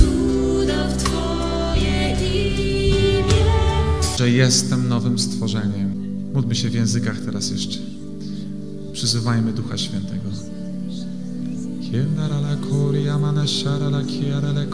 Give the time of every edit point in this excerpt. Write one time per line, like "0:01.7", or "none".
none